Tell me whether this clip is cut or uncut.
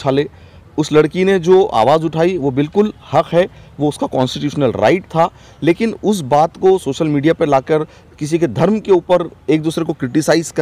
uncut